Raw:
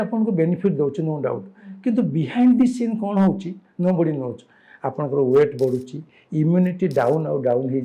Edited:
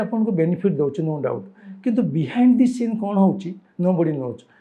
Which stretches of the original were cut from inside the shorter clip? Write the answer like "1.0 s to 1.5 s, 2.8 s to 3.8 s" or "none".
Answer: none